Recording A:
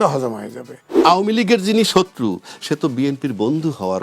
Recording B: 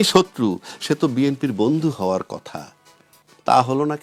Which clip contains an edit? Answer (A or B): A